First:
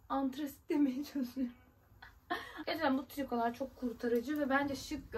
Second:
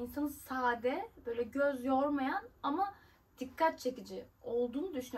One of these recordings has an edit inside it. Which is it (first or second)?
first